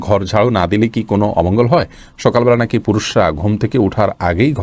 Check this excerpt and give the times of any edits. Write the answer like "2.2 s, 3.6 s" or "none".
none

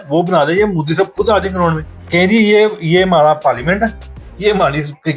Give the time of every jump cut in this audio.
none

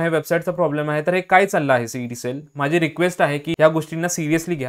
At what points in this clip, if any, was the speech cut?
none

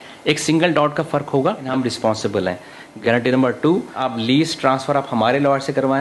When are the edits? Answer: 1.7 s, 2.9 s, 4.0 s

